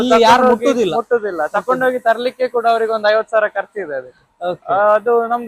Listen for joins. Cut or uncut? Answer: uncut